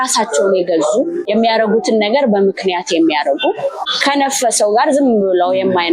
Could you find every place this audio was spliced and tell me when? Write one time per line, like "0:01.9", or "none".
0:01.3
0:03.9